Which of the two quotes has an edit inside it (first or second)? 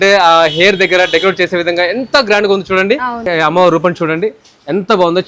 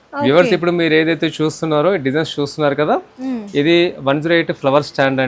first